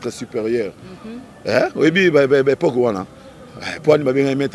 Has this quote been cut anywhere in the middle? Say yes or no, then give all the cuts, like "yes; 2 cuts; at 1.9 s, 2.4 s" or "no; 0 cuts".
no; 0 cuts